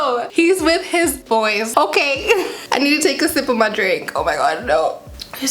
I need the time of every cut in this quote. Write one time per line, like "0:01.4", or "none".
none